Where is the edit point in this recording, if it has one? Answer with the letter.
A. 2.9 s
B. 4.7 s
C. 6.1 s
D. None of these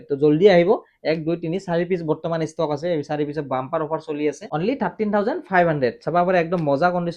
D